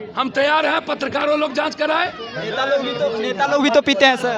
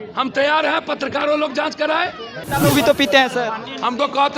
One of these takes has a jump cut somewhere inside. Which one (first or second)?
second